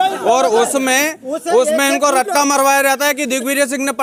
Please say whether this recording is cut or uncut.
uncut